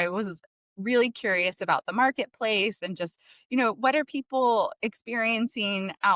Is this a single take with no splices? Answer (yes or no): yes